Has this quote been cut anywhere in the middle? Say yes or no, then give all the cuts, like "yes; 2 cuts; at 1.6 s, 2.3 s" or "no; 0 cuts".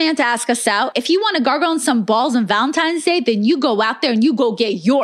yes; 1 cut; at 0.9 s